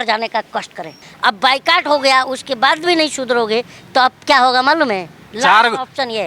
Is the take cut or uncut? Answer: cut